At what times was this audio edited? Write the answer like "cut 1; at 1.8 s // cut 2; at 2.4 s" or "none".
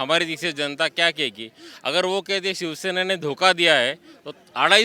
none